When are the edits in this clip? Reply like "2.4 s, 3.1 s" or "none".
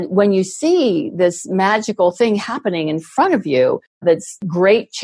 4.1 s